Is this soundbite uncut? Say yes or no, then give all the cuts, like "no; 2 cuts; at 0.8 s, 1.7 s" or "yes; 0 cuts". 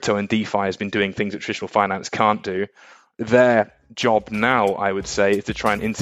yes; 0 cuts